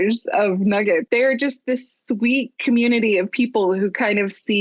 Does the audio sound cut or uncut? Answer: uncut